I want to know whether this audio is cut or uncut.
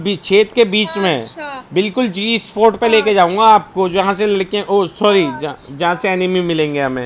uncut